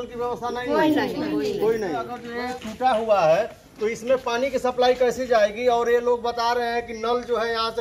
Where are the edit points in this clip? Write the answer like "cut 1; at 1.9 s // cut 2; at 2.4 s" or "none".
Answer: cut 1; at 2.2 s